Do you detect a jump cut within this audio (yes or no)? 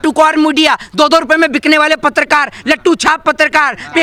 no